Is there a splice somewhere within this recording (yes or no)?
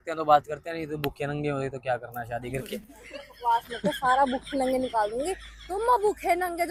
no